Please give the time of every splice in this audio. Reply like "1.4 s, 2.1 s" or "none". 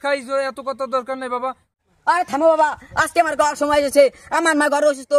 1.7 s